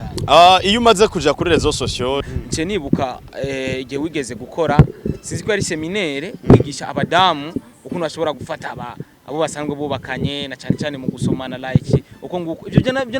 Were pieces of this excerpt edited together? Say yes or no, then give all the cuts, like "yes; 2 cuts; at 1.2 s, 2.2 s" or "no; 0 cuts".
yes; 1 cut; at 2.3 s